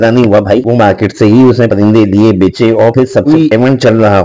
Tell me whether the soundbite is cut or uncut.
cut